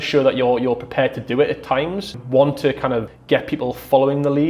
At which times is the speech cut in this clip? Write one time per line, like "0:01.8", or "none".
0:02.2
0:03.1